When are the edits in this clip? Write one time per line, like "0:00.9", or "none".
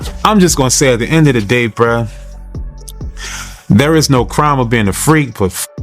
none